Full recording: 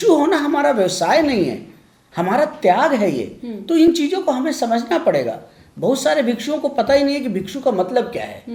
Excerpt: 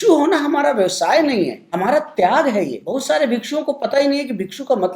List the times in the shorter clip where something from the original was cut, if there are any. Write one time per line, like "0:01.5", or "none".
0:01.6
0:02.8